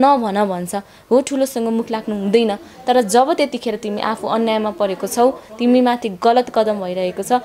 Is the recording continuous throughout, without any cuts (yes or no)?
yes